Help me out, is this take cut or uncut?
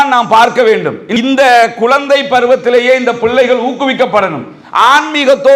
cut